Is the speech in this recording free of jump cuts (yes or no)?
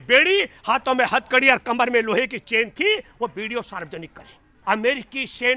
no